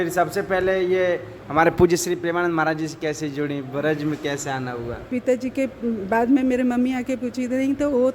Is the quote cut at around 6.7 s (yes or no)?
no